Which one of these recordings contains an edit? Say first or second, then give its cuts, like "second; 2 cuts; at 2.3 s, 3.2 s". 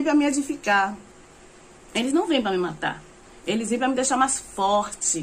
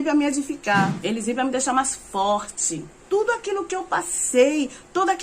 second; 2 cuts; at 1.0 s, 3.0 s